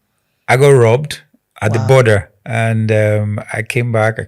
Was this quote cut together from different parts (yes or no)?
yes